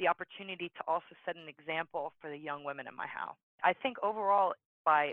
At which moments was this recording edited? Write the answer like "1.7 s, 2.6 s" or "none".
3.4 s